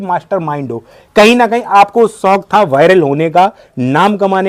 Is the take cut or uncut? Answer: uncut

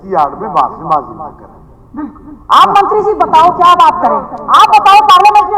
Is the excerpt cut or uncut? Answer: uncut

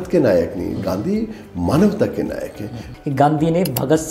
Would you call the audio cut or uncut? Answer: cut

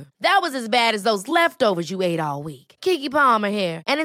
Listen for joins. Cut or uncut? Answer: uncut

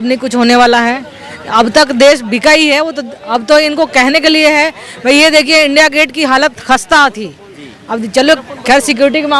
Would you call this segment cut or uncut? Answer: uncut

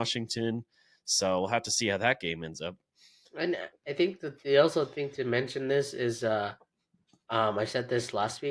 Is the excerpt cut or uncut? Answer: uncut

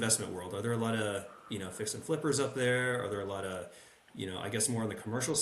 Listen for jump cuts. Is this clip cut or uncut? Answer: uncut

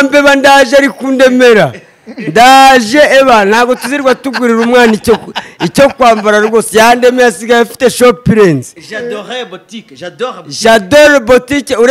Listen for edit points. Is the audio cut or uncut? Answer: uncut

